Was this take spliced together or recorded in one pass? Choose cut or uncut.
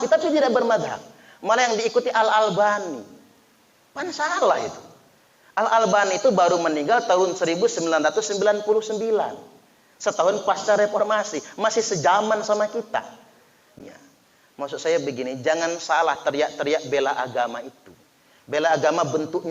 cut